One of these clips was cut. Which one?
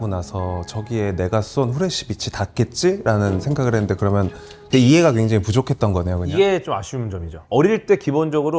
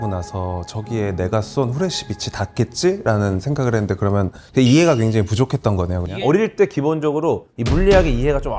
second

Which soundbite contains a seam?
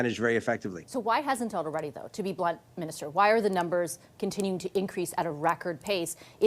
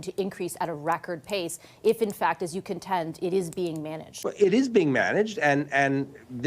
second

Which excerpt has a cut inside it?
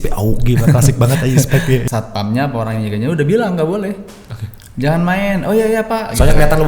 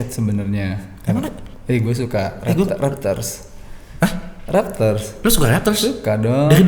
first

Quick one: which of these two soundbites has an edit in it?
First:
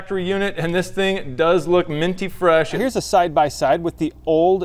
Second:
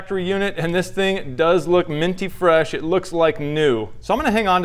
first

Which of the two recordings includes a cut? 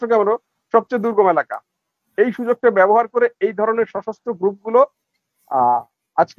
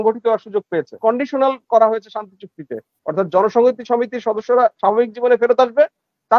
second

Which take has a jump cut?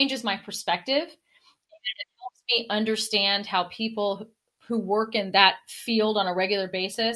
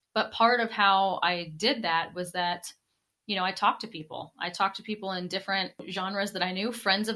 second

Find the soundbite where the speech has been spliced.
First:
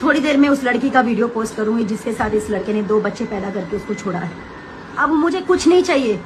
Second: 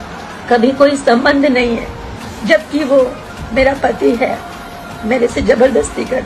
first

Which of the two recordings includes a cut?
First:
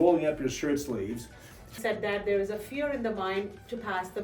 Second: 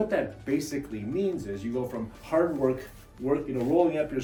first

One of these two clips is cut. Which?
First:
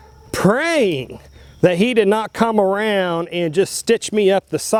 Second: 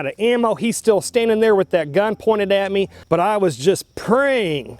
second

